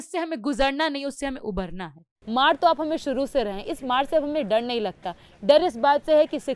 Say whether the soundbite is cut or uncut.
cut